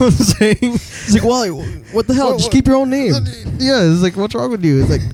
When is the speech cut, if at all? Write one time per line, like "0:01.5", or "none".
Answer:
none